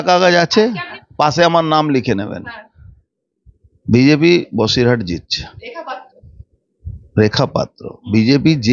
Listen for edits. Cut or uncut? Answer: cut